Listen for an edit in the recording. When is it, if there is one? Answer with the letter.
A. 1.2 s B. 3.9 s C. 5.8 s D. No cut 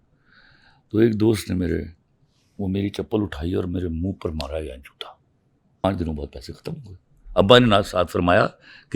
C